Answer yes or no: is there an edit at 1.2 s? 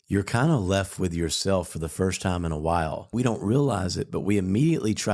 no